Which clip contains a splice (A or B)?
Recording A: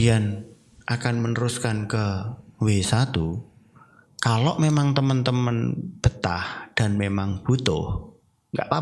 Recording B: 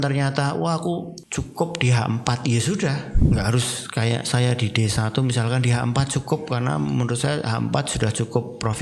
B